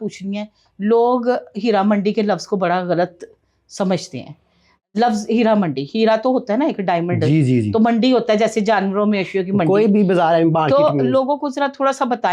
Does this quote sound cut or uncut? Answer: uncut